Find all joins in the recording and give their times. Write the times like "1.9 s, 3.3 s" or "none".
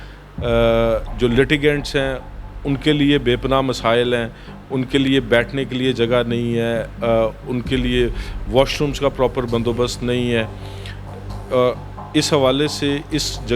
none